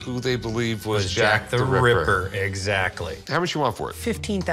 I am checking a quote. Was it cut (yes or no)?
no